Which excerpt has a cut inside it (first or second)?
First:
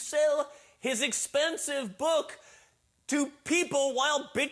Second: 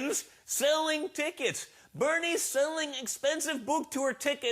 second